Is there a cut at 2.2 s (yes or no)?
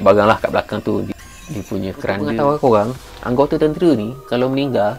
yes